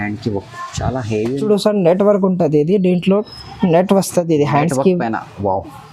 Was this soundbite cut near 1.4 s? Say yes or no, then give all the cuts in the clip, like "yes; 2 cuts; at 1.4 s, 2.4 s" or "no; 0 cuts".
yes; 1 cut; at 1.4 s